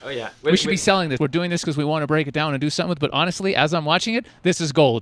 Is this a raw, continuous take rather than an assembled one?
no; 1 cut; at 1.2 s

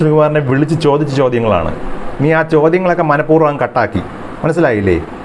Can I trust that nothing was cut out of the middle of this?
yes; 0 cuts

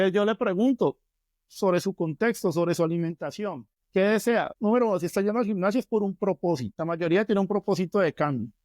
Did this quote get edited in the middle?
yes; 3 cuts; at 3.7 s, 4.5 s, 6.7 s

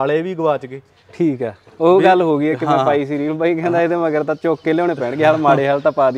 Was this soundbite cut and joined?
no; 0 cuts

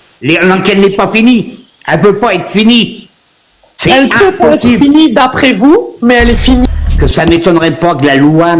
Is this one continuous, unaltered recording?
no; 1 cut; at 6.6 s

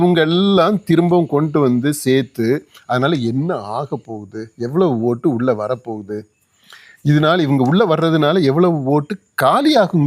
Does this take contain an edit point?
no; 0 cuts

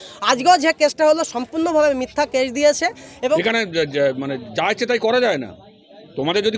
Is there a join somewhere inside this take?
yes; 1 cut; at 3.4 s

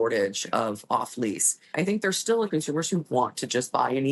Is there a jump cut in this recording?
yes; 2 cuts; at 1.6 s, 2.5 s

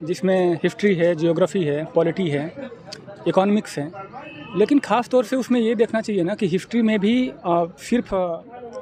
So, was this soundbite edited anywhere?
no; 0 cuts

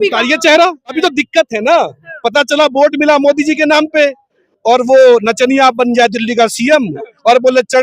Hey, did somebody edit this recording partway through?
yes; 1 cut; at 1.0 s

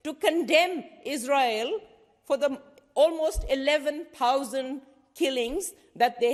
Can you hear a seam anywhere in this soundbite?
no; 0 cuts

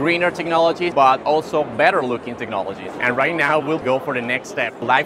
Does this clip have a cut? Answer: yes; 2 cuts; at 0.9 s, 2.9 s

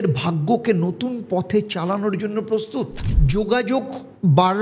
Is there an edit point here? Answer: yes; 1 cut; at 3.0 s

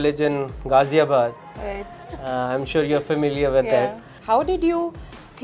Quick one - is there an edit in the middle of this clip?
no; 0 cuts

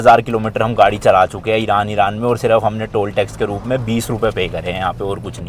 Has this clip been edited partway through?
no; 0 cuts

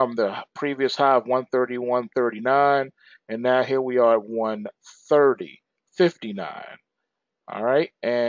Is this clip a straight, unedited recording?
no; 1 cut; at 2.1 s

